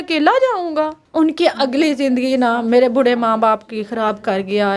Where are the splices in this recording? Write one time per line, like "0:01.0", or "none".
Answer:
0:01.0